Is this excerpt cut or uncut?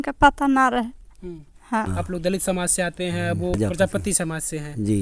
cut